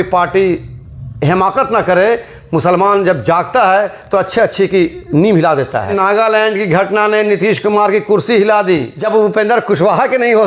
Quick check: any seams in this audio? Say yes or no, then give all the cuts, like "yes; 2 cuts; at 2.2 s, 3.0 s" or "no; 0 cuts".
yes; 2 cuts; at 5.9 s, 8.9 s